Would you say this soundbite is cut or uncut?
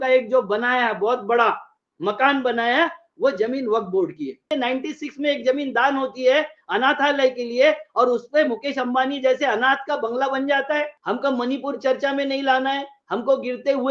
cut